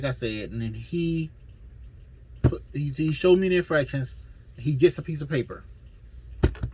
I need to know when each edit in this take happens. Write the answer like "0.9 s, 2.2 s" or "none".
none